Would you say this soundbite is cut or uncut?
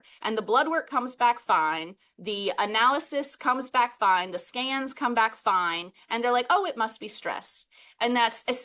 uncut